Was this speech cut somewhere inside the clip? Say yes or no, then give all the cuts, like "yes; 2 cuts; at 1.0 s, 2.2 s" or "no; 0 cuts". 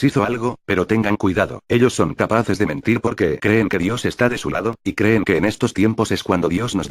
yes; 1 cut; at 4.6 s